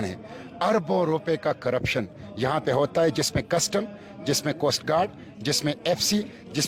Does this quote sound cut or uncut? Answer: uncut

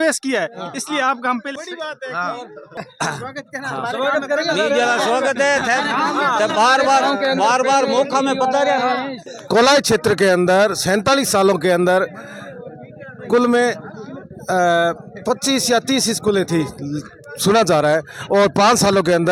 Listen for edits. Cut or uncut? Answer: uncut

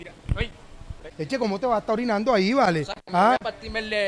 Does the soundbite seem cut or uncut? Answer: cut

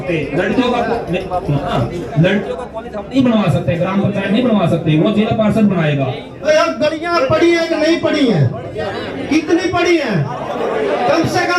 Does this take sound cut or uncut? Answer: cut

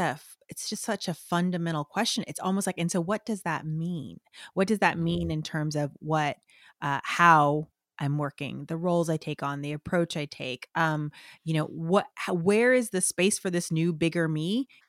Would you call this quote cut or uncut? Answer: uncut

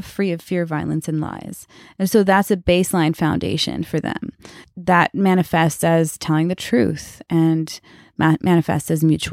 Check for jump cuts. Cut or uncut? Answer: cut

